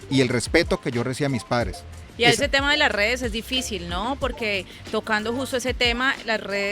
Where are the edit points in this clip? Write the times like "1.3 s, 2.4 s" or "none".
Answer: 2.0 s